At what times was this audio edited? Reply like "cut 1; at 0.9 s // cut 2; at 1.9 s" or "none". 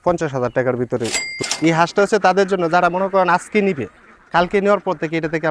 cut 1; at 1.2 s